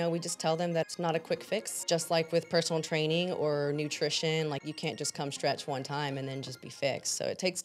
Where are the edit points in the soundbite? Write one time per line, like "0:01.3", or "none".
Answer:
0:00.8
0:01.8
0:04.7